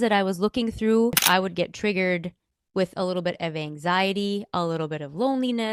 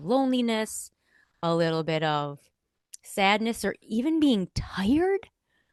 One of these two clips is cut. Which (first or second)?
first